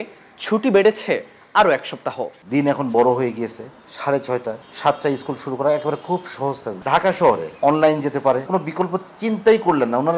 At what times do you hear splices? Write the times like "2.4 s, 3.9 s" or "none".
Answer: 2.4 s, 4.7 s, 6.7 s, 7.5 s, 8.5 s